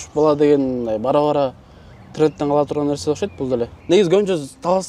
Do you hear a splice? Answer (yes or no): yes